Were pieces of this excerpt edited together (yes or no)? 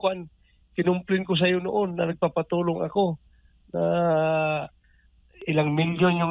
no